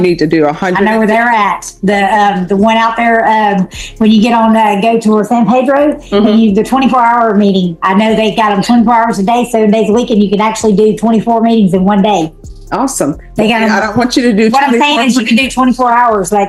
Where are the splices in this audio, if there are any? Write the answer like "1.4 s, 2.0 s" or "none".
none